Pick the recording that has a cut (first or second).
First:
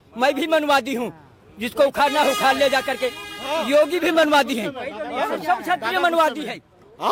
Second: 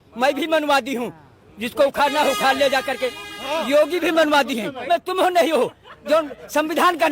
second